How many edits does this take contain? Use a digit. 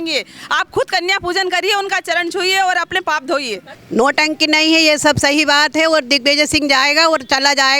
0